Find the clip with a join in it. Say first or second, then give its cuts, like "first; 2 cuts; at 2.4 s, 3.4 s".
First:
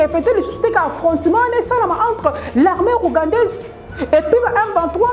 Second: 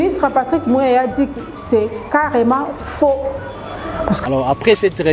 second; 1 cut; at 4.2 s